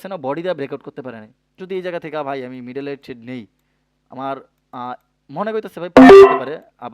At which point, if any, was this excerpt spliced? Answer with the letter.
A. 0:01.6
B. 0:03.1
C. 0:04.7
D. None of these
A